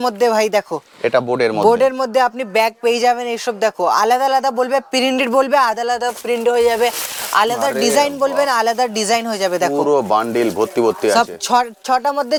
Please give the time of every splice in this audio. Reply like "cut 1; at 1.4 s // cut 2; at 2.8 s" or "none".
none